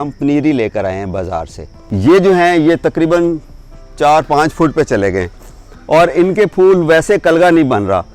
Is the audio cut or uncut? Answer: cut